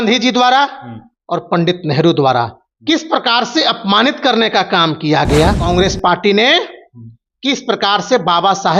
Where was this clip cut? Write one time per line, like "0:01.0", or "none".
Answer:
0:05.7